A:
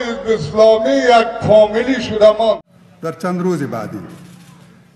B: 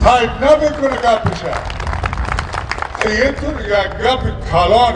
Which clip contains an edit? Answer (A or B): A